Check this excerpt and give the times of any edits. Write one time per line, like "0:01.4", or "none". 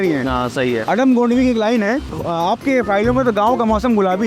0:02.1